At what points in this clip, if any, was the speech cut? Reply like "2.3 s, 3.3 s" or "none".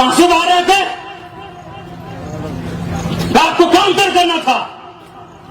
none

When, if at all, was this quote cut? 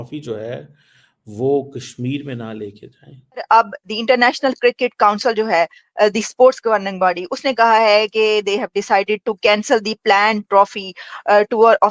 3.4 s

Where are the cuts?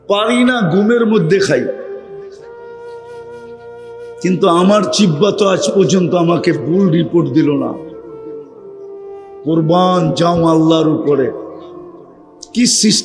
7.8 s, 9.4 s

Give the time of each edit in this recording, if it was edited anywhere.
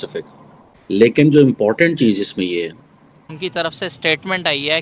3.3 s

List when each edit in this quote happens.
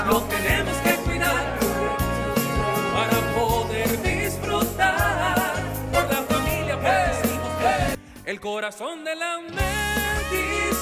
none

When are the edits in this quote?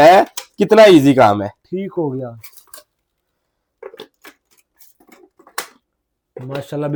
none

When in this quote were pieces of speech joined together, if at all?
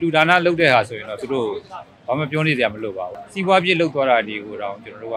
3.1 s

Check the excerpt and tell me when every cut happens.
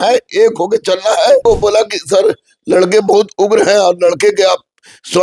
1.4 s

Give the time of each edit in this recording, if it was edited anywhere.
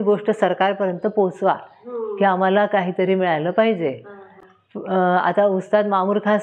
none

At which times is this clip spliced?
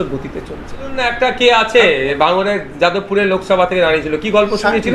1.1 s

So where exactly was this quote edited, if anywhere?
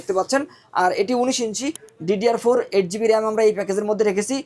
1.8 s

